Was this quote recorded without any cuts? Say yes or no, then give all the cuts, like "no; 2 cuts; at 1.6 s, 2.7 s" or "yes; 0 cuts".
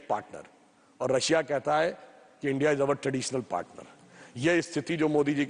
yes; 0 cuts